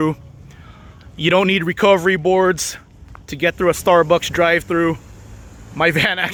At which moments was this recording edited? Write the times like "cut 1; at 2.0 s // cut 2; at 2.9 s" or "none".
none